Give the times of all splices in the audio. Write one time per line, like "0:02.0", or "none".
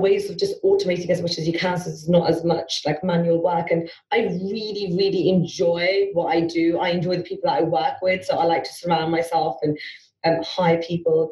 none

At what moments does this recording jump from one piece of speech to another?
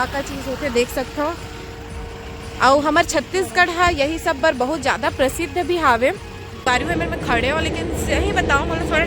0:06.5

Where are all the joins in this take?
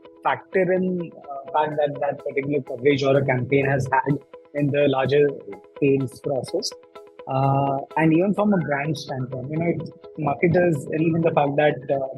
0:01.4
0:11.0

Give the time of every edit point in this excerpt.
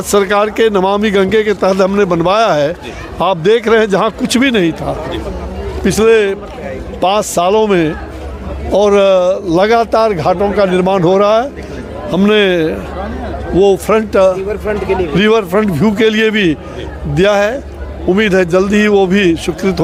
none

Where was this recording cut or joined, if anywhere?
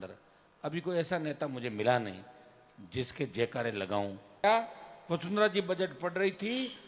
0:04.4

